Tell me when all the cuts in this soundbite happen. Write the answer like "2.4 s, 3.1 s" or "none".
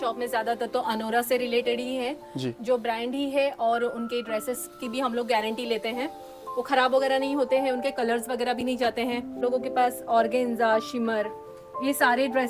9.4 s